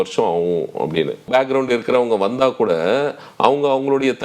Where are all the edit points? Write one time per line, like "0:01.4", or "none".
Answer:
0:01.3

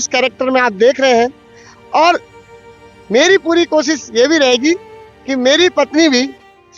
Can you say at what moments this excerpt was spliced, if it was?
none

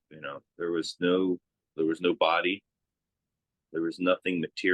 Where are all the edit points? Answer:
0:01.6

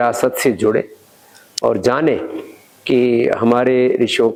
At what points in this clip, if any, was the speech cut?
none

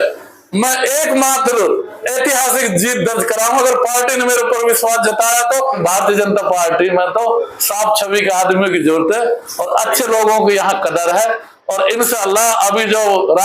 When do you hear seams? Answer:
0:05.8

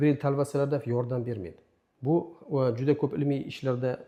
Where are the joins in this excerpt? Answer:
none

